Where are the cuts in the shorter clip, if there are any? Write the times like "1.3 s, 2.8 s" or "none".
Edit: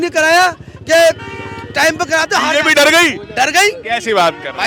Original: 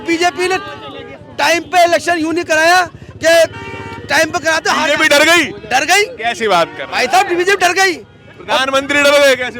none